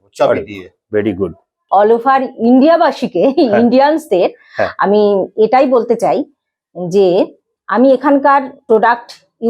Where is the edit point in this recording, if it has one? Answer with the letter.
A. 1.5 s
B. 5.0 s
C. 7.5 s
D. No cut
A